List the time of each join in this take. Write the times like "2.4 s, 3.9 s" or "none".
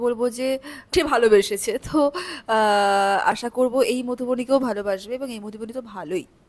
0.9 s